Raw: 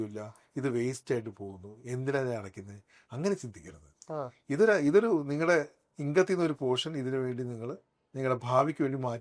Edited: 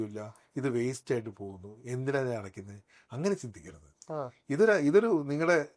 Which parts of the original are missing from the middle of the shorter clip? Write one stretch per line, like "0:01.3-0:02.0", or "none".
none